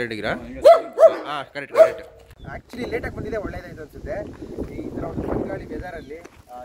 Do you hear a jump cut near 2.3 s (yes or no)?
yes